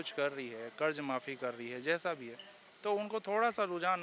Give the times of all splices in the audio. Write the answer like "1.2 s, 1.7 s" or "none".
none